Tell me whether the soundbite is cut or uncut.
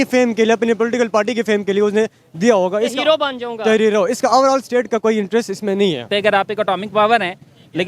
cut